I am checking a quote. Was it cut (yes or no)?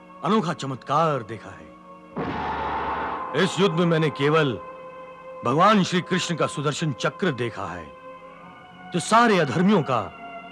yes